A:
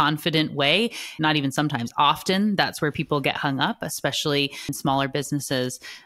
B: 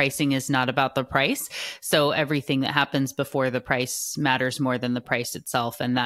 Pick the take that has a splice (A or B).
A